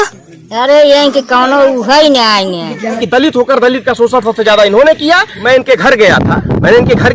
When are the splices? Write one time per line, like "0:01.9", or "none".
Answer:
0:03.0
0:05.3